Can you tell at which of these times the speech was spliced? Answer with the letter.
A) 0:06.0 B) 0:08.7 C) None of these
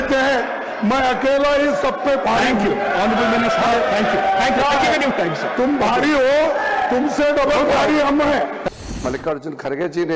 B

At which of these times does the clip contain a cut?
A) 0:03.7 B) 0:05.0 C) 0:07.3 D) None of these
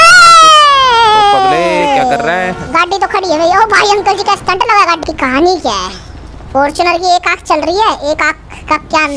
B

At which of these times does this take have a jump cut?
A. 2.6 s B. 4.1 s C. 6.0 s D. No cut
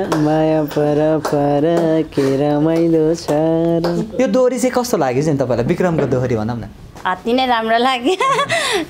B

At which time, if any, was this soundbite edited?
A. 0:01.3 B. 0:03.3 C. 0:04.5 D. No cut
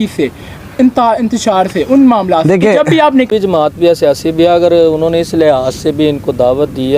B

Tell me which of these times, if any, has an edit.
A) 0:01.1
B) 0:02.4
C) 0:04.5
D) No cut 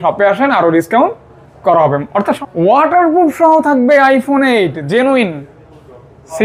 B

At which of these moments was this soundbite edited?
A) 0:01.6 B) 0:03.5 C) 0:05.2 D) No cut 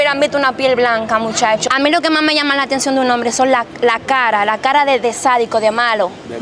A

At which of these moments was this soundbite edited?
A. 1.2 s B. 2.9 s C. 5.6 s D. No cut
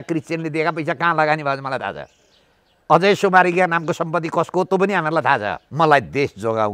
C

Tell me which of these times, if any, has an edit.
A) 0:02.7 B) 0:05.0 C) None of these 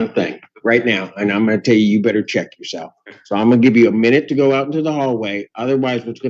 C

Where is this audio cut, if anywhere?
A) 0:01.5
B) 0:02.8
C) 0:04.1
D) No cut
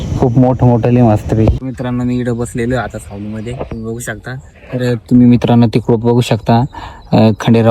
A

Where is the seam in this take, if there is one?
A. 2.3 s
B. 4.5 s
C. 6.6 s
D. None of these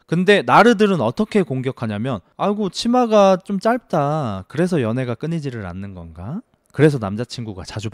A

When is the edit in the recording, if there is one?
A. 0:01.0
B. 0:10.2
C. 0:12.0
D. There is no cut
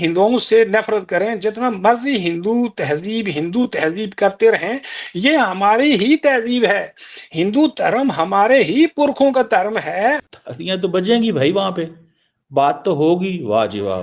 B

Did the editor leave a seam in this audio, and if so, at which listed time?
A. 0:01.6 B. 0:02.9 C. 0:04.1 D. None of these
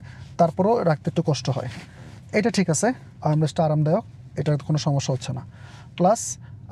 D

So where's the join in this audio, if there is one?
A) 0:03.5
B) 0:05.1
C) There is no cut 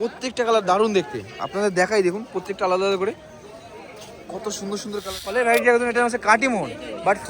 B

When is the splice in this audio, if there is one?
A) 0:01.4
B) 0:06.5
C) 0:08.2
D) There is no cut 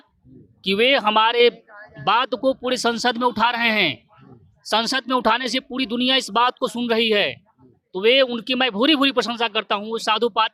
D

